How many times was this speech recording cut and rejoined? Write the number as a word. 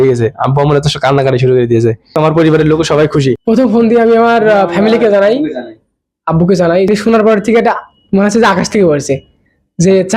three